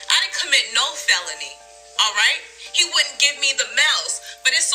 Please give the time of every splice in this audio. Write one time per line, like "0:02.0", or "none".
none